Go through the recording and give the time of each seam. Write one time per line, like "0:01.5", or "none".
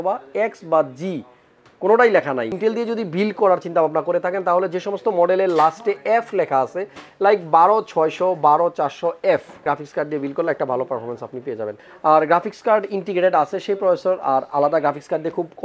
0:02.6
0:09.6
0:11.8